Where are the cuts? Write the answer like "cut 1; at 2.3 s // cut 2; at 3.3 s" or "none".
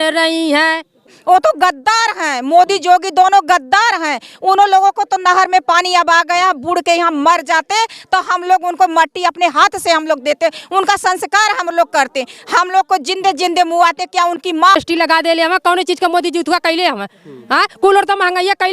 cut 1; at 1.1 s // cut 2; at 14.7 s